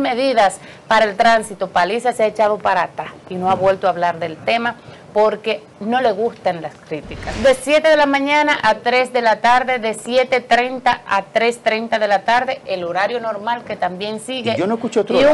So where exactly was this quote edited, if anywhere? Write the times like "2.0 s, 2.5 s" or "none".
7.3 s